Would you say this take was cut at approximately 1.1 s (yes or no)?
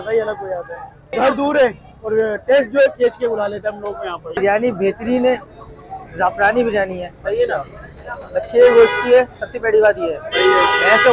yes